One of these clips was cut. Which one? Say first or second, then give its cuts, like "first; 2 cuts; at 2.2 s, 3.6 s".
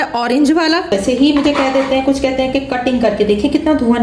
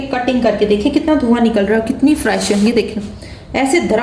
first; 1 cut; at 0.9 s